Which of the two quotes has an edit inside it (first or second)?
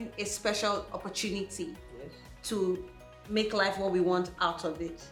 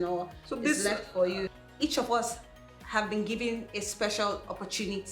second